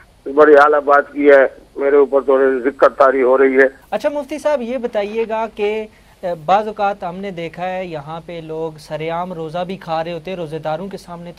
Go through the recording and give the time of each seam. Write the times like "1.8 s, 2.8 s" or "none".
3.9 s